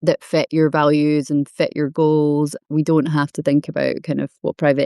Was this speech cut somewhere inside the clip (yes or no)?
yes